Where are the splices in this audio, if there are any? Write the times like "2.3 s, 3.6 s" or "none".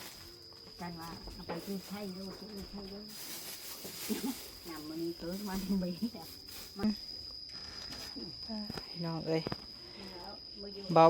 6.8 s

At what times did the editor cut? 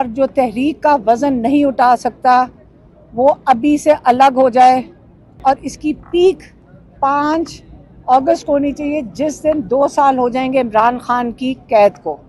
5.4 s

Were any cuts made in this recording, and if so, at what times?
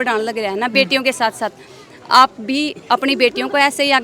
none

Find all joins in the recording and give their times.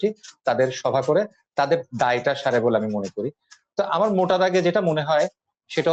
none

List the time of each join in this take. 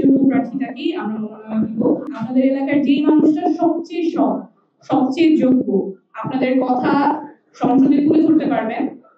2.2 s

